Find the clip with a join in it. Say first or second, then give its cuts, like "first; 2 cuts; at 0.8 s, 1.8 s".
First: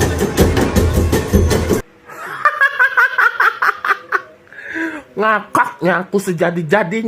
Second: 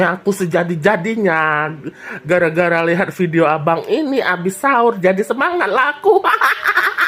first; 1 cut; at 1.8 s